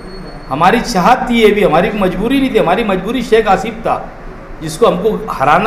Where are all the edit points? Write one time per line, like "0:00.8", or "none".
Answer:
none